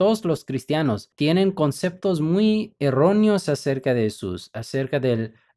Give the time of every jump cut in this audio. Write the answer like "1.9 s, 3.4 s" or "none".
1.1 s

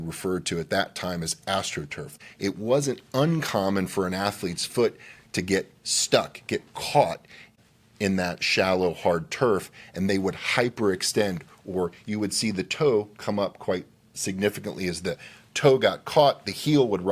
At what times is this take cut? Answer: 2.2 s, 7.5 s

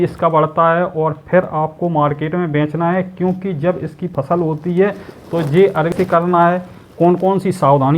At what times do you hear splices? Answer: 5.9 s

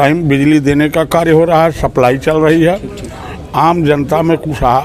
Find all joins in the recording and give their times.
none

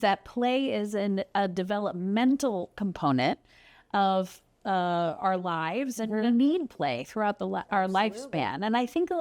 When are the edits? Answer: none

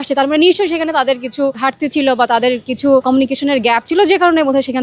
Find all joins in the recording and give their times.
1.6 s, 3.0 s

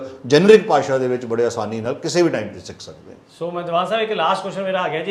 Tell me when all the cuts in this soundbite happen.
none

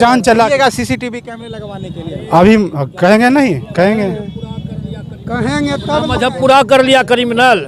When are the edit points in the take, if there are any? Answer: none

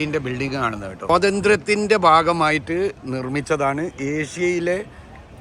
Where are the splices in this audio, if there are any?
1.1 s

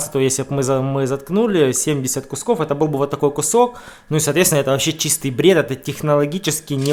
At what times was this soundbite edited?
none

